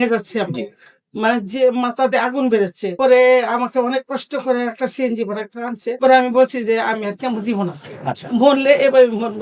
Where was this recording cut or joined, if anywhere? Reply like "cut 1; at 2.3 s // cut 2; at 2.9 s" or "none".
none